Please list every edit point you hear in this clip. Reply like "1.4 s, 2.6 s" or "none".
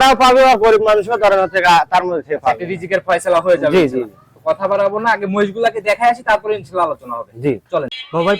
none